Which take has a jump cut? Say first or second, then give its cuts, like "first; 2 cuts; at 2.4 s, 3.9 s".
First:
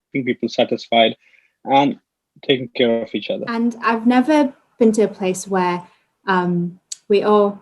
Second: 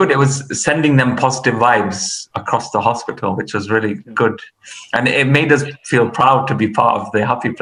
first; 1 cut; at 3.5 s